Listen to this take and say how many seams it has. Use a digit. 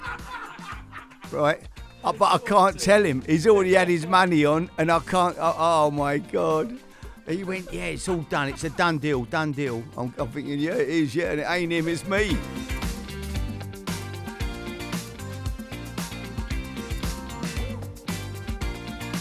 1